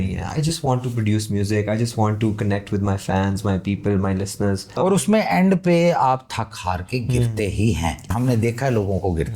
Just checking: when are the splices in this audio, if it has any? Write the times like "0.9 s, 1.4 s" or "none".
4.7 s, 8.0 s